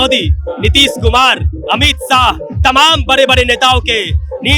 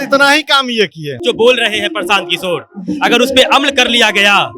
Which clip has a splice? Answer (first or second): second